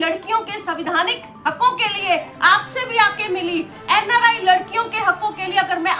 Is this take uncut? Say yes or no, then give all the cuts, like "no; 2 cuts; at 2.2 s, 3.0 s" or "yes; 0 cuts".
yes; 0 cuts